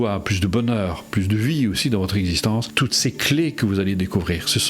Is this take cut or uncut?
cut